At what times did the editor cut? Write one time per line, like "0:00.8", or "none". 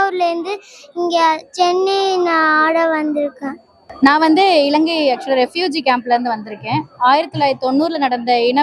0:03.8